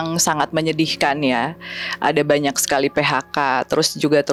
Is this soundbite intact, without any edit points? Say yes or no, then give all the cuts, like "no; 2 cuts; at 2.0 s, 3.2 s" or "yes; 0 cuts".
yes; 0 cuts